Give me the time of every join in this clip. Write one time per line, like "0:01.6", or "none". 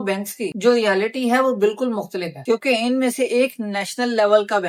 none